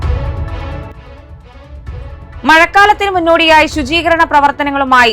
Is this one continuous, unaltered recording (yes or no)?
yes